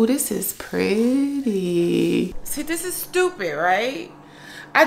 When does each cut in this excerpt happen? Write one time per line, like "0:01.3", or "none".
0:02.3